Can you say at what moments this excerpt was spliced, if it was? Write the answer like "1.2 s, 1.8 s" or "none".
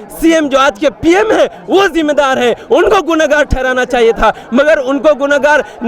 none